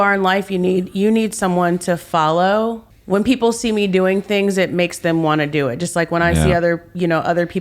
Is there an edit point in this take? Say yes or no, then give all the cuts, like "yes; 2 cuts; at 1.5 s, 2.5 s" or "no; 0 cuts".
yes; 1 cut; at 2.9 s